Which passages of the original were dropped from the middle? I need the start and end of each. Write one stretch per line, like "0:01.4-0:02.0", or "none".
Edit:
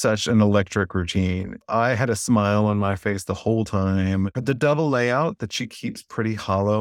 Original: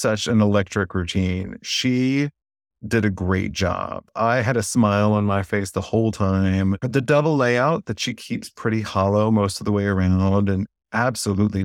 0:01.6-0:04.0